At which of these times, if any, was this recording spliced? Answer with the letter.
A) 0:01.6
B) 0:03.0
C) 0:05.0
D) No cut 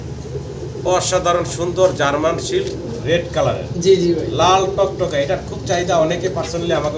D